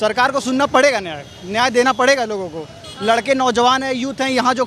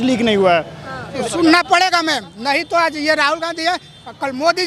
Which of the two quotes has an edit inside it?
second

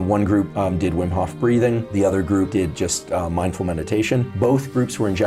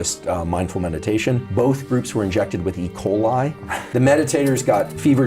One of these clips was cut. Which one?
second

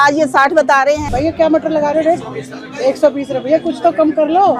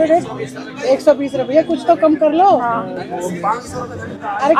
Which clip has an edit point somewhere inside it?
first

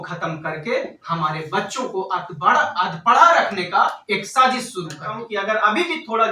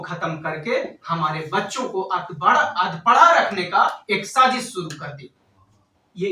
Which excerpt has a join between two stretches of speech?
first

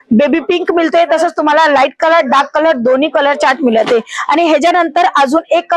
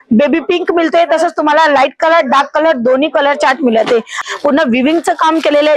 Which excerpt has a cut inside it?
second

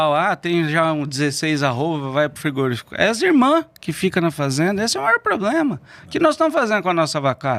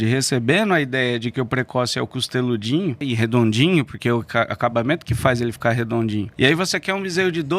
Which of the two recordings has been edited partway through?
second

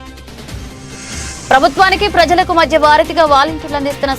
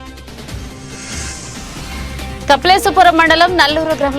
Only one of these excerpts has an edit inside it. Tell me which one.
first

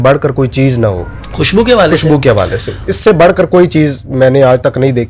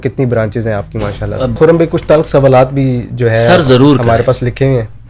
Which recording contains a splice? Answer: second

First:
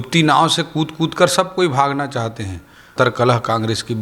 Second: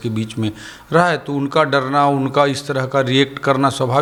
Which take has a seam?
first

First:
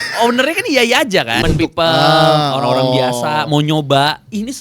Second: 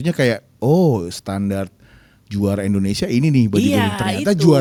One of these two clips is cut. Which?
first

